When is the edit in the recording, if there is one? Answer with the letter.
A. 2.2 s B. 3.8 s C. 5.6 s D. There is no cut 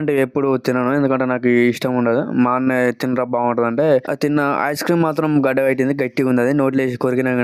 D